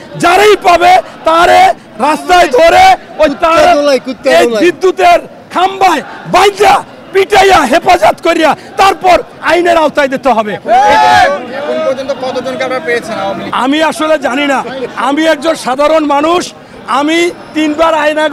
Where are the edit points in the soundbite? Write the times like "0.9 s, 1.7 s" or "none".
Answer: none